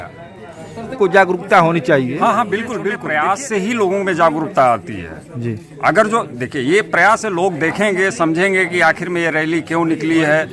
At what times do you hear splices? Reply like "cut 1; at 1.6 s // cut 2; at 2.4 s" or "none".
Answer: cut 1; at 0.9 s // cut 2; at 3.0 s